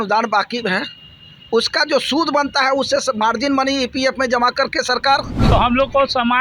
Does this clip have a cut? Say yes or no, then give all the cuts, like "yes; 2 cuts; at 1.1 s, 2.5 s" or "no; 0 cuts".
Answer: yes; 1 cut; at 5.3 s